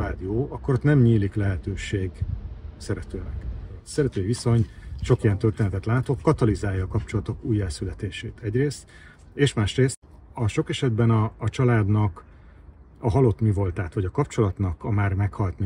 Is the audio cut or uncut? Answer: cut